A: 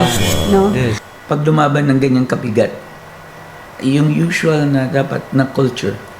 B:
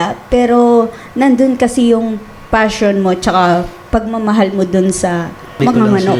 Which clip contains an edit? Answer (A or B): A